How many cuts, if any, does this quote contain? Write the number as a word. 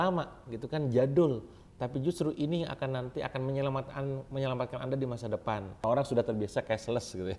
one